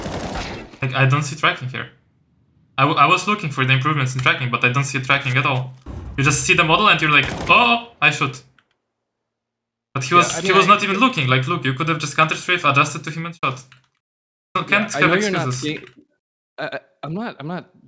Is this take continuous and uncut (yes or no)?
yes